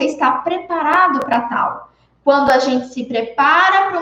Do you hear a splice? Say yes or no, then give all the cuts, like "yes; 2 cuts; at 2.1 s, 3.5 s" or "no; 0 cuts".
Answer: no; 0 cuts